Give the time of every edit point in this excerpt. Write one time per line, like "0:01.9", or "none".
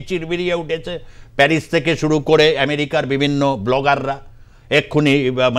none